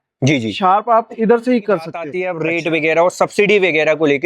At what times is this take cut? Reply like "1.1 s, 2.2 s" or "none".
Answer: 2.2 s